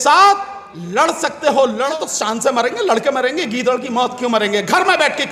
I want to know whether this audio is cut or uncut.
cut